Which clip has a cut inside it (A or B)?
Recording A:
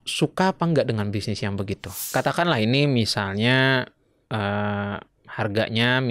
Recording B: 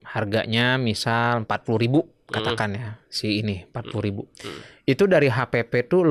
A